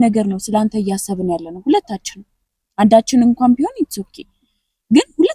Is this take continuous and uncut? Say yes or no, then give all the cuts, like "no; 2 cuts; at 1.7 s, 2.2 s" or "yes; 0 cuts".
yes; 0 cuts